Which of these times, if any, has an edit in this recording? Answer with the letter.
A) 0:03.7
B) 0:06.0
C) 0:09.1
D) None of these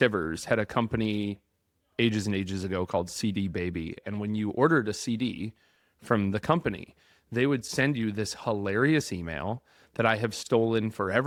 D